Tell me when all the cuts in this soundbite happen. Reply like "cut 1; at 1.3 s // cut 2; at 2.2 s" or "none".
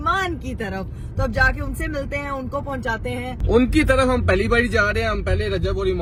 none